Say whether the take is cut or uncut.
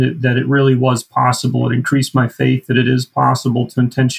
uncut